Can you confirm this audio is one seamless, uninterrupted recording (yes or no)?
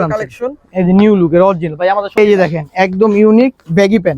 no